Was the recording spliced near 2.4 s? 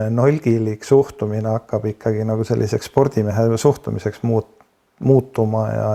no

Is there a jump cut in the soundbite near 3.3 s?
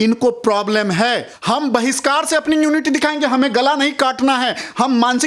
no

